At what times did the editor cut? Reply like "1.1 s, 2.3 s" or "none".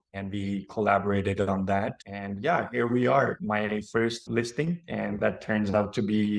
3.4 s

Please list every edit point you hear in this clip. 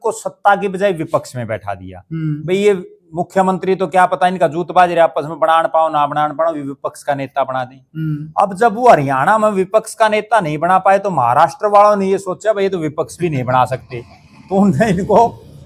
none

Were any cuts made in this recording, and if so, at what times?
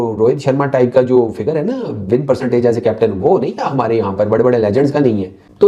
none

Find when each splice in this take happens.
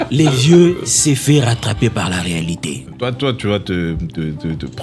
2.8 s

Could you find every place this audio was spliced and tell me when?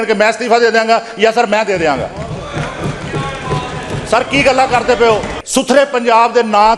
5.4 s

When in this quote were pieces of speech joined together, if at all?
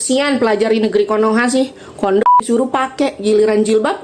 none

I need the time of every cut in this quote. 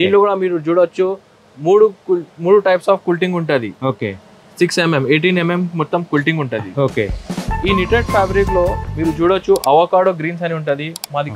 none

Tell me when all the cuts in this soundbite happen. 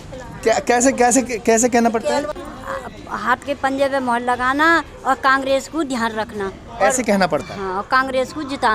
2.4 s

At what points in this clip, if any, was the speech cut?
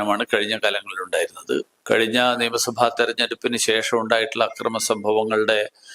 1.7 s

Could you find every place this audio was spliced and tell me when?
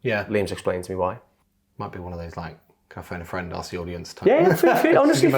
1.4 s

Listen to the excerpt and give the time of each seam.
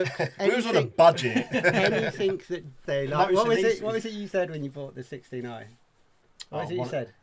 2.8 s

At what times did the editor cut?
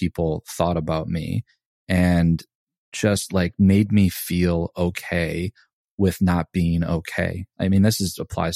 2.8 s, 7.4 s

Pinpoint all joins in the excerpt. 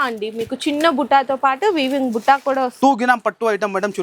2.7 s

